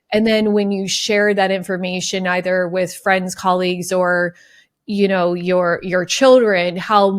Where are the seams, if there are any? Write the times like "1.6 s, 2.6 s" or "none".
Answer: none